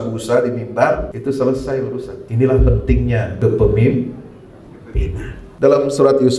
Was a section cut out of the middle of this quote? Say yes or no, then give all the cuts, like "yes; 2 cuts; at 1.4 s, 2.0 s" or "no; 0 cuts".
yes; 4 cuts; at 1.1 s, 2.2 s, 3.3 s, 5.4 s